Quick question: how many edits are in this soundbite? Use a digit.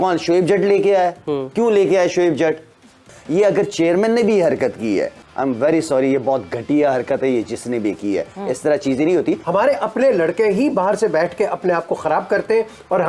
2